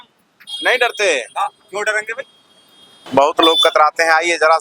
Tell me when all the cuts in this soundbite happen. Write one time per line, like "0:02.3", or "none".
0:02.9